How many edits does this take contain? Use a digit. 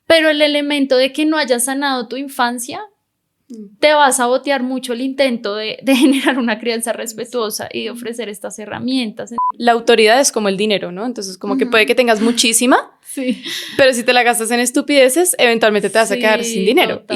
1